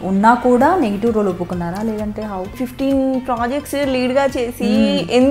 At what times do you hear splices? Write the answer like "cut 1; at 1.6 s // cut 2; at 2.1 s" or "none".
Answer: cut 1; at 2.5 s